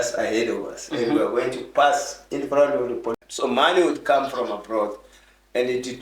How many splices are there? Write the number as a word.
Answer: one